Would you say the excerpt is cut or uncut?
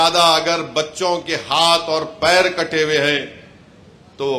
uncut